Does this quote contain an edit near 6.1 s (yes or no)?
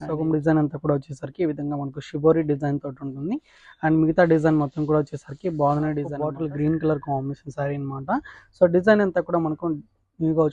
yes